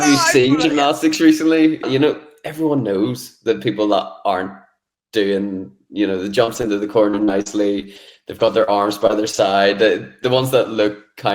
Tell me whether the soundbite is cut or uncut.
cut